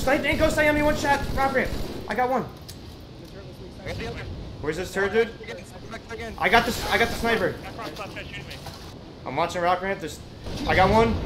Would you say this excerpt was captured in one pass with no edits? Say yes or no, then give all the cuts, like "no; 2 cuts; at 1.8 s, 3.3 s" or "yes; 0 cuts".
no; 1 cut; at 9.0 s